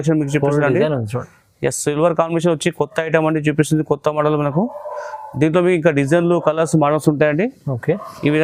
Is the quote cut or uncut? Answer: uncut